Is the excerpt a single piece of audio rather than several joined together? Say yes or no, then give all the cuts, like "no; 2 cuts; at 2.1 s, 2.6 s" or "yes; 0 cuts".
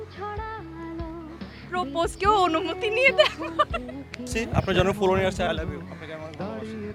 no; 1 cut; at 4.4 s